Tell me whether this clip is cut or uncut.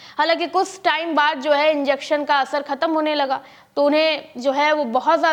uncut